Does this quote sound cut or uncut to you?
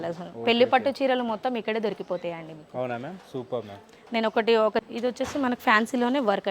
cut